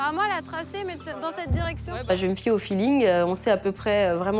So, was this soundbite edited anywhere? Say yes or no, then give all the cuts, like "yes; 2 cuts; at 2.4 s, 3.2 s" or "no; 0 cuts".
yes; 1 cut; at 2.1 s